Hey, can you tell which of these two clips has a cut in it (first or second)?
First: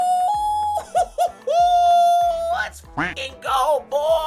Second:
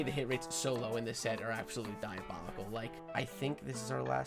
second